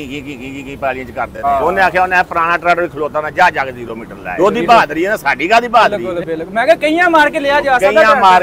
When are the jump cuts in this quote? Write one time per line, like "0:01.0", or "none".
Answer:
0:01.4
0:04.3
0:06.1